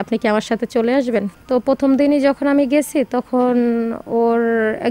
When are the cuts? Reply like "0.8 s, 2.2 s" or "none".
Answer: 1.3 s